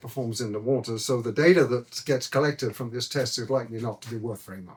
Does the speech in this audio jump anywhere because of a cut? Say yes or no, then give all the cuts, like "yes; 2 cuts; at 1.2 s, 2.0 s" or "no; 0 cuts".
no; 0 cuts